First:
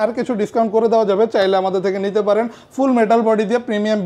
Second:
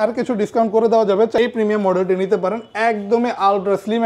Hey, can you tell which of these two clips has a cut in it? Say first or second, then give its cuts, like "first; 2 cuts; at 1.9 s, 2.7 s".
second; 1 cut; at 1.3 s